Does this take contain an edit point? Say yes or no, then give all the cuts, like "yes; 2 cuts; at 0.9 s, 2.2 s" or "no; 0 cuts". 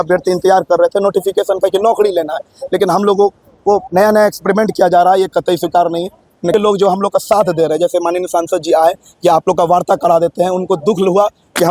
yes; 1 cut; at 6.5 s